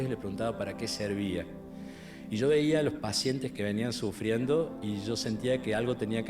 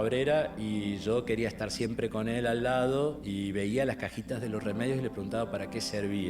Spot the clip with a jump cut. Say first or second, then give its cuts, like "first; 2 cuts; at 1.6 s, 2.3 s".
first; 1 cut; at 3.5 s